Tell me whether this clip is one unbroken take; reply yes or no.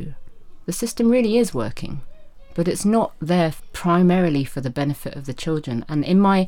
no